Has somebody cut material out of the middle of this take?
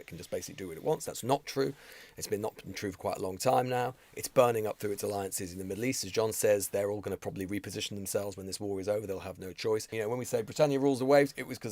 yes; 1 cut; at 9.9 s

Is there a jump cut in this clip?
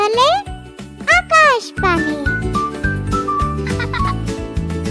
yes; 1 cut; at 2.1 s

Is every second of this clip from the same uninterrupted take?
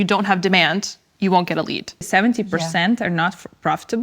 no; 1 cut; at 2.1 s

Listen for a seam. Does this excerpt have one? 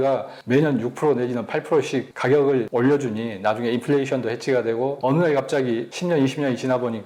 yes; 4 cuts; at 2.1 s, 2.7 s, 5.0 s, 5.9 s

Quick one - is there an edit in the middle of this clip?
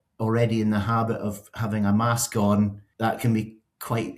yes; 1 cut; at 2.8 s

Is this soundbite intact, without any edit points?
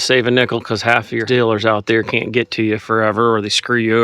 no; 1 cut; at 1.2 s

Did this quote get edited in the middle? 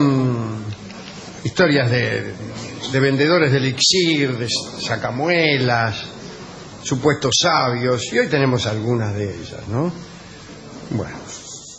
no; 0 cuts

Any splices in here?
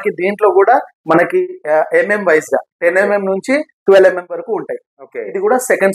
no; 0 cuts

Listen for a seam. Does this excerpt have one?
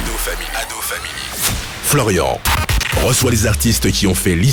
no; 0 cuts

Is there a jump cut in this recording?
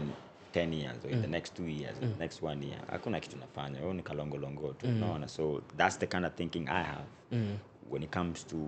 no; 0 cuts

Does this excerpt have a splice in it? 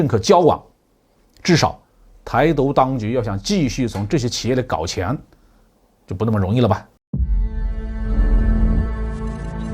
yes; 1 cut; at 6.9 s

